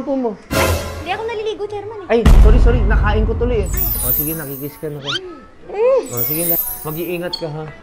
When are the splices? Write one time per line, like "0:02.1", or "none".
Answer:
0:03.9
0:06.6